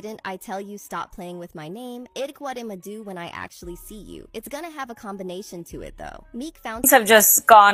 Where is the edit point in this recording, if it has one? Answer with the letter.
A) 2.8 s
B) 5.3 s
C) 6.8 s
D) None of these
C